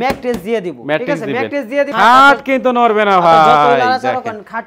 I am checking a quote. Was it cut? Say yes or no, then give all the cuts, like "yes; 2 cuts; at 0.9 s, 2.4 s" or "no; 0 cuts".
yes; 1 cut; at 1.9 s